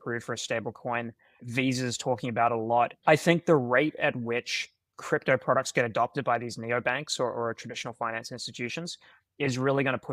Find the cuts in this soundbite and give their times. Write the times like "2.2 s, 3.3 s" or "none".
1.4 s, 3.0 s